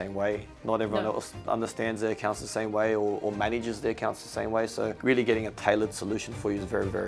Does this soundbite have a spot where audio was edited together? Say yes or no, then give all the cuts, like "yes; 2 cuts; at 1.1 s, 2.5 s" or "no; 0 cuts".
no; 0 cuts